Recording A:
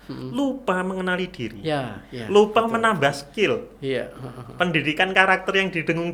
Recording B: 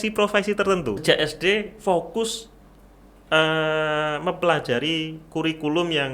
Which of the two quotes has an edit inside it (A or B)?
B